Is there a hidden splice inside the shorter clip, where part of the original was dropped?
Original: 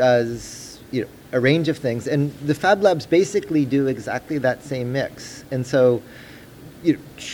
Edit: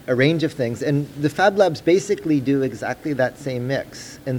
no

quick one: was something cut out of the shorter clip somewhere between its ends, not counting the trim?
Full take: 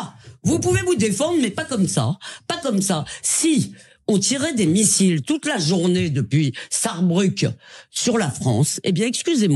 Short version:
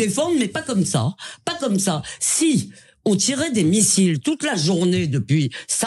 no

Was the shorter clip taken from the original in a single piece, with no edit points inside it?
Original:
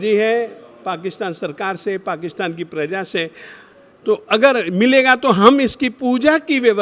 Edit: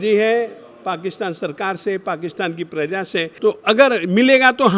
no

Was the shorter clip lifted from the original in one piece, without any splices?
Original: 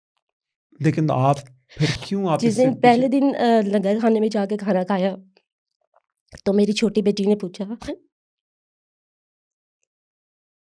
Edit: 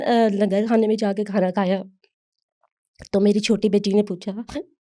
yes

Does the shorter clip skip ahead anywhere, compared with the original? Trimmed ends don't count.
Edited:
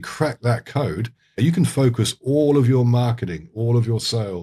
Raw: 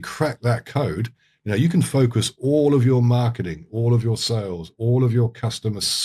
yes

